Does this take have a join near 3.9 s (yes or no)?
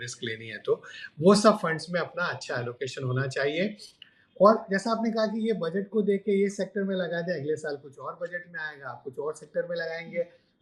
no